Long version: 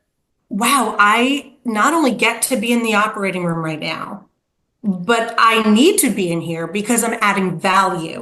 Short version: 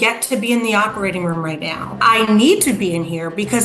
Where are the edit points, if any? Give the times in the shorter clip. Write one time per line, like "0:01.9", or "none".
0:01.9